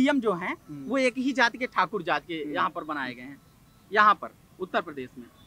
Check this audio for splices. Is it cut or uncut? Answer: uncut